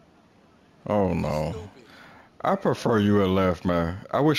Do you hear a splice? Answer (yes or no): no